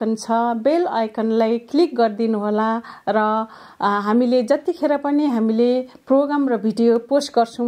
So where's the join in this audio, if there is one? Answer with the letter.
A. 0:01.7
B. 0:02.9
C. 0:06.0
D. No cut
D